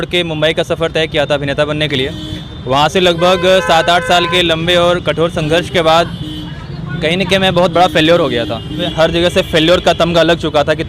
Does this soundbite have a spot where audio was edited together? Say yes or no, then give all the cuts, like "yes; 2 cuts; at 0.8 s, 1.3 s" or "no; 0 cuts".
yes; 1 cut; at 8.9 s